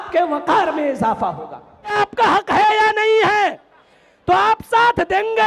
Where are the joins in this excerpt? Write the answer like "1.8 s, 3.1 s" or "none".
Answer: 1.9 s